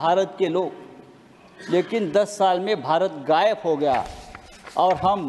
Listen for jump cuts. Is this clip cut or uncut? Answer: uncut